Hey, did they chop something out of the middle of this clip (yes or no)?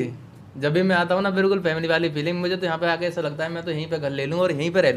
no